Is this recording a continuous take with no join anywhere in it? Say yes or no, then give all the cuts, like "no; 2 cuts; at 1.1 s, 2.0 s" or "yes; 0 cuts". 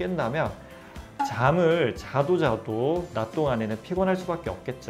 yes; 0 cuts